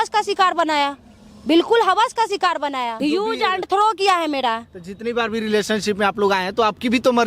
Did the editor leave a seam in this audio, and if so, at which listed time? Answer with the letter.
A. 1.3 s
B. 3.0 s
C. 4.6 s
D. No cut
B